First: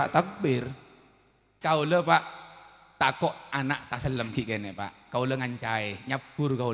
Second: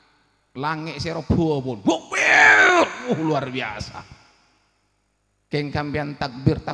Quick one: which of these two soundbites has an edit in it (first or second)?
first